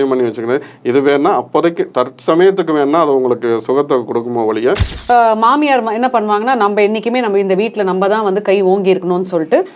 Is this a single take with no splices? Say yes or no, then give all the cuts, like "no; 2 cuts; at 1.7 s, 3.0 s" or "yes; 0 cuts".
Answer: no; 1 cut; at 4.9 s